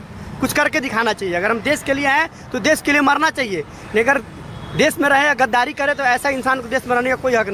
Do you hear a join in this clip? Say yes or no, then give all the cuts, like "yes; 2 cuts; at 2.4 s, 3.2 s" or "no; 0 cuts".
no; 0 cuts